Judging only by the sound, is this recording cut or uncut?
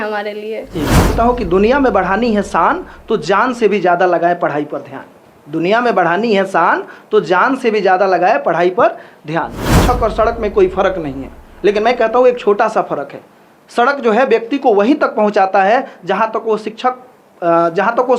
cut